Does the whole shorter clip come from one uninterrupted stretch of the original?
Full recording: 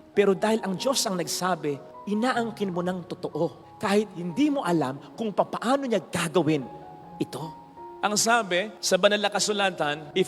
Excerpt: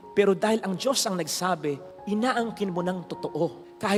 yes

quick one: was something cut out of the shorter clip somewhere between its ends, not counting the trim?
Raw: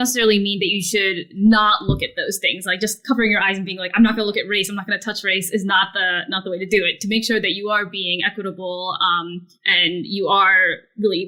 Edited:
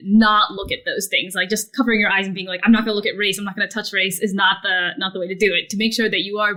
no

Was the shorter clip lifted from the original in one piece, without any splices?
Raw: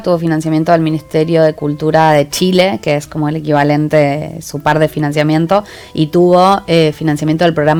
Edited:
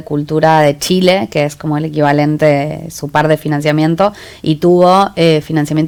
yes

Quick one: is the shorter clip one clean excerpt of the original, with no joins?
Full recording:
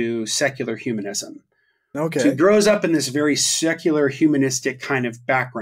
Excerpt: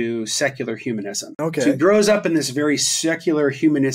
no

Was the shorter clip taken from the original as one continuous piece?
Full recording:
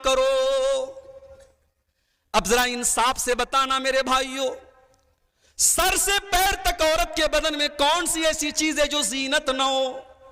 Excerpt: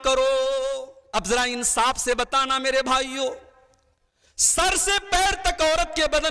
no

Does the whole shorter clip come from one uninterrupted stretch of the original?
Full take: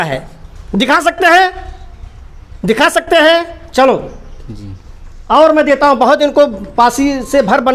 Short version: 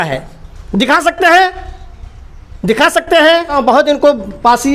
no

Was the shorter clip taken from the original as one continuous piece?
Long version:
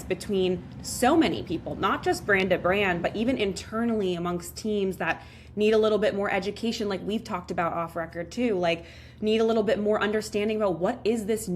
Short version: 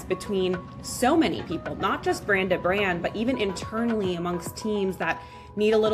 yes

